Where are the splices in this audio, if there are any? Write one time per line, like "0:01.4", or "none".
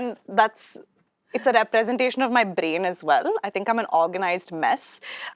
none